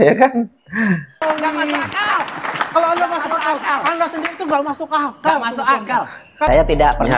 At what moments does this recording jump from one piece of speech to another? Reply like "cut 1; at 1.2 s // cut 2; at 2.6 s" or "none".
cut 1; at 1.1 s // cut 2; at 6.5 s